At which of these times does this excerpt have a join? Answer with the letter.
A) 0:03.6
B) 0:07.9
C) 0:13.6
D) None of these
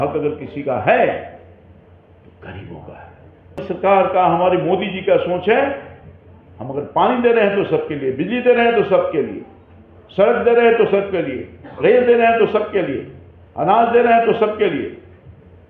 A